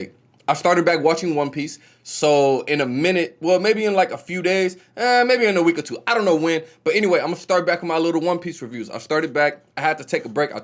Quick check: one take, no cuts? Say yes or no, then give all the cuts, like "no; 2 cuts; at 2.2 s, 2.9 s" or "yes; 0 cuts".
yes; 0 cuts